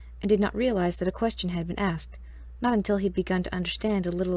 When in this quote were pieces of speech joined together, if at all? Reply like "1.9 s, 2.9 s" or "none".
3.5 s